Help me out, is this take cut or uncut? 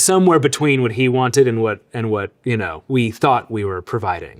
uncut